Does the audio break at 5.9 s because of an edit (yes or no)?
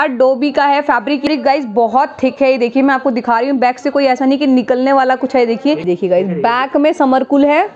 yes